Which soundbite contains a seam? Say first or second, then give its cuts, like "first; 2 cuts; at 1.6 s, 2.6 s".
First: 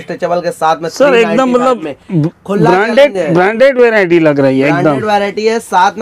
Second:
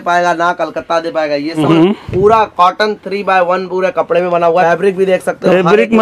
second; 2 cuts; at 1.6 s, 4.6 s